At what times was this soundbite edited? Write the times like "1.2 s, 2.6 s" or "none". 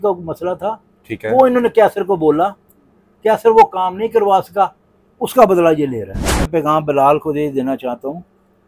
6.4 s